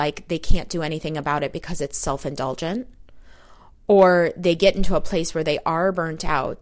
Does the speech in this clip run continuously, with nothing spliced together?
yes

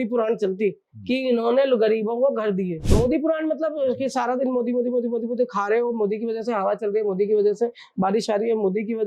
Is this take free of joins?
no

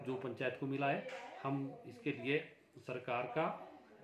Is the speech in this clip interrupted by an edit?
no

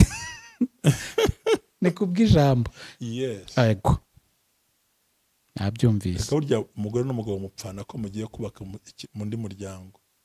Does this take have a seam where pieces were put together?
no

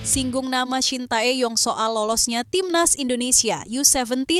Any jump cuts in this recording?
no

